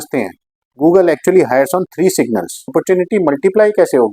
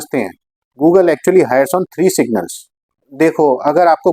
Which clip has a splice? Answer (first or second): first